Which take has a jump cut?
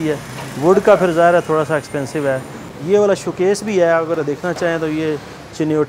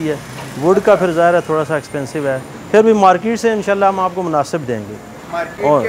first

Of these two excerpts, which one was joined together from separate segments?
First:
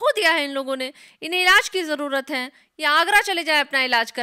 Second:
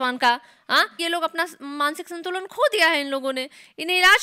second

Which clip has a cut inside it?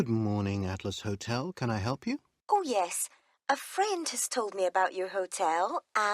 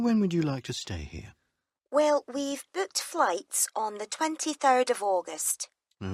first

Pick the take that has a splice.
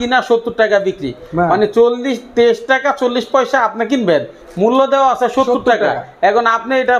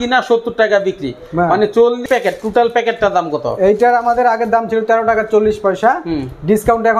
second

